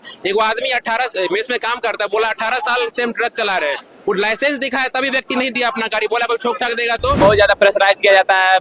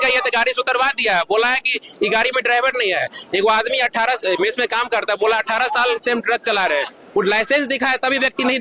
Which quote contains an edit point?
first; 1 cut; at 7.2 s

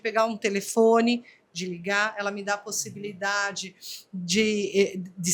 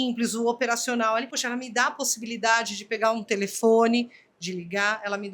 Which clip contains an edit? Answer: second; 1 cut; at 1.4 s

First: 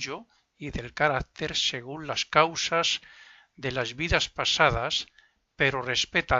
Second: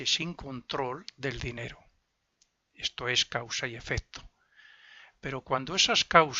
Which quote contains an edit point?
second; 1 cut; at 1.1 s

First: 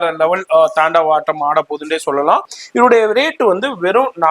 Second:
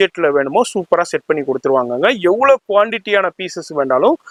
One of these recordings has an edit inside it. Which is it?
first; 1 cut; at 2.6 s

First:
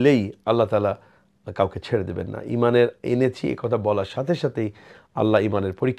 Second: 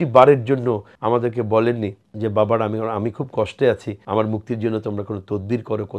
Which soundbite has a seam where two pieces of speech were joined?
second; 3 cuts; at 0.9 s, 2.0 s, 3.9 s

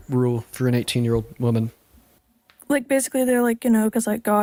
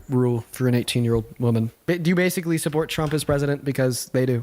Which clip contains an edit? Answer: second; 1 cut; at 1.7 s

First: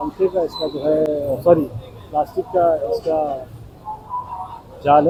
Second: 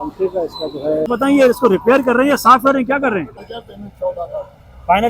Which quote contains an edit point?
second; 2 cuts; at 1.1 s, 3.4 s

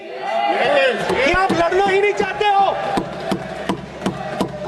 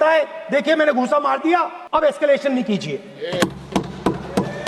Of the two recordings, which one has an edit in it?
second; 1 cut; at 1.8 s

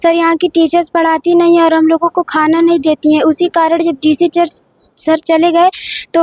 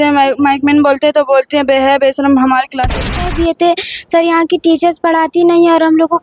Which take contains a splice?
second; 1 cut; at 3.0 s

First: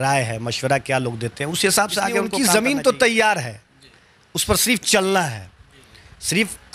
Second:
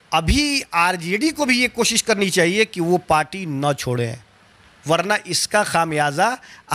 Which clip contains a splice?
first; 1 cut; at 2.3 s

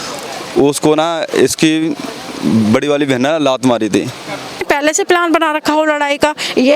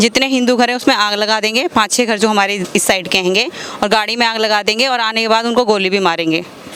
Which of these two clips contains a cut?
first; 1 cut; at 4.6 s

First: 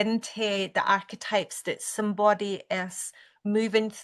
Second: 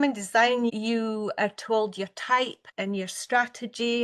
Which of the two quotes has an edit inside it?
second; 2 cuts; at 0.7 s, 2.6 s

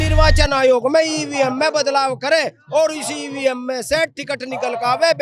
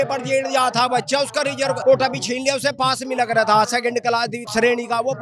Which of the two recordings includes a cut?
second; 2 cuts; at 1.8 s, 4.4 s

